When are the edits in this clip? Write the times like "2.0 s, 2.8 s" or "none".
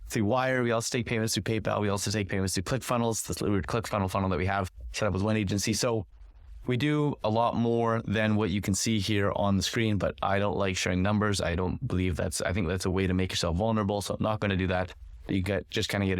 none